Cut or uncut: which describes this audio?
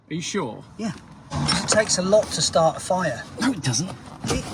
cut